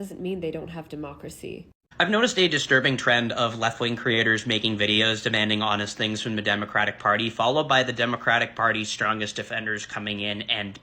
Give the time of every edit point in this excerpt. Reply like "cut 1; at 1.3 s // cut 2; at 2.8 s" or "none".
cut 1; at 1.7 s

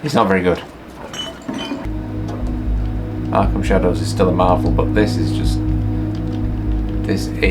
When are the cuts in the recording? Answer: cut 1; at 1.8 s

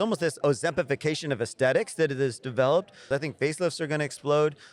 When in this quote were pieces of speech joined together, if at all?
cut 1; at 3.0 s

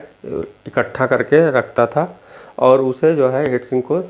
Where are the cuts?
none

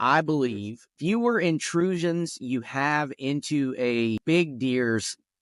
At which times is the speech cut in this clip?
cut 1; at 0.9 s // cut 2; at 4.2 s

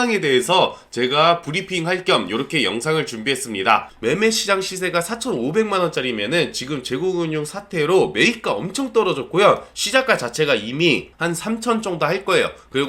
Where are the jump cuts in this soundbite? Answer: cut 1; at 3.9 s

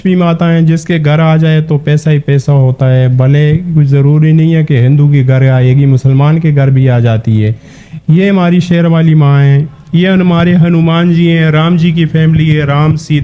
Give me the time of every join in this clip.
none

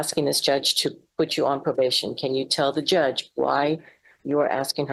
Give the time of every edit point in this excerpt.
none

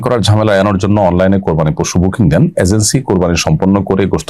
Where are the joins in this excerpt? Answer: none

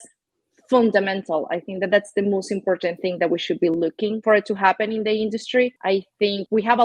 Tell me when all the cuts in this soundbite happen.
cut 1; at 4.2 s // cut 2; at 5.8 s

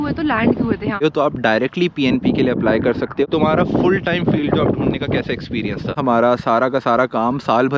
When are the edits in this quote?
cut 1; at 1.0 s // cut 2; at 3.2 s // cut 3; at 5.9 s

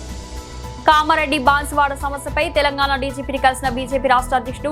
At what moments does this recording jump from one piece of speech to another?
none

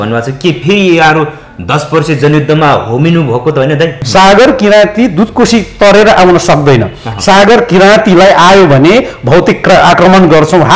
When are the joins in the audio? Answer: cut 1; at 4.0 s

